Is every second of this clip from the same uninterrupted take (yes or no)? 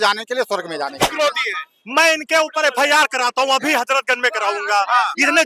no